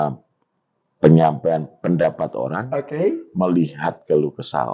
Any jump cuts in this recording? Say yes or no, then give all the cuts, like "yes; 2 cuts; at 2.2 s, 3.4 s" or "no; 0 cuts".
no; 0 cuts